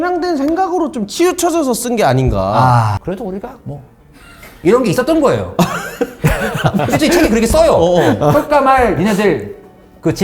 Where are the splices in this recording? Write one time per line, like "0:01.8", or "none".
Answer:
0:03.0
0:06.9